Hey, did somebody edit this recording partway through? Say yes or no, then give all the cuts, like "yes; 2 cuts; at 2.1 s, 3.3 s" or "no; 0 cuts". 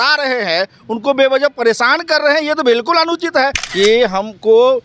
yes; 1 cut; at 3.6 s